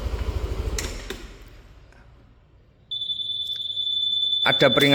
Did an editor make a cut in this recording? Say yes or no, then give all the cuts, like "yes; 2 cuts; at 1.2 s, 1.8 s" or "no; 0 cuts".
no; 0 cuts